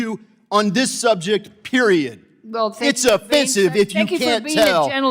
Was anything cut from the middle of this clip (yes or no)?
no